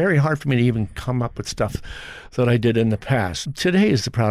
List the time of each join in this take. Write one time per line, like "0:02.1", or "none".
0:03.4